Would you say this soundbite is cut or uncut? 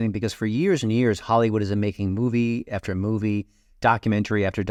uncut